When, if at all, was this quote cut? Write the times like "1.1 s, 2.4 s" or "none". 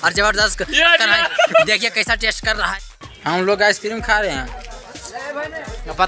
3.1 s